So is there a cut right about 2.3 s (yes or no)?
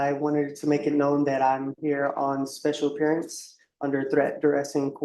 no